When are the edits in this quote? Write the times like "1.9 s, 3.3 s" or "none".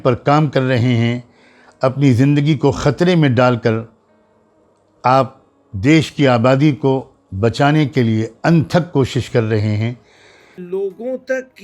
10.6 s

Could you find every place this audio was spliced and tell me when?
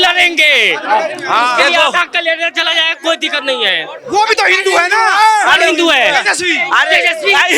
none

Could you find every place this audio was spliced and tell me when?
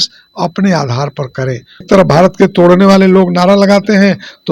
1.9 s

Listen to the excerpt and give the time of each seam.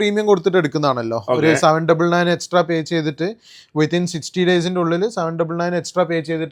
none

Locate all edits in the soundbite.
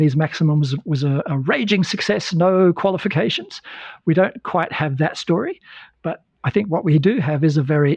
none

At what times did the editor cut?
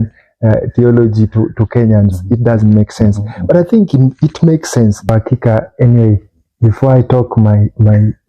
5.0 s

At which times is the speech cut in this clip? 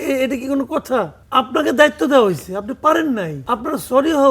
1.2 s, 3.4 s

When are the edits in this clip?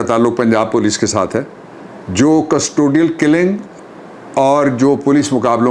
none

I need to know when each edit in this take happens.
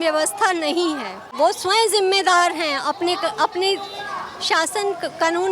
1.3 s

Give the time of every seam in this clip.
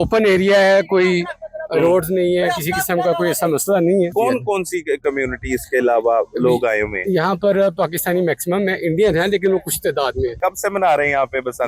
4.1 s, 10.4 s

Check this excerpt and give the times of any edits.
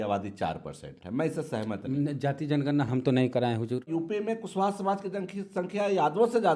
3.9 s

